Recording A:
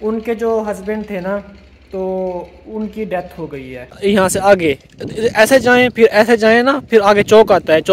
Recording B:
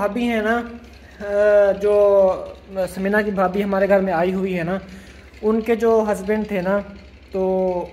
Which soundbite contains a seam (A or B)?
A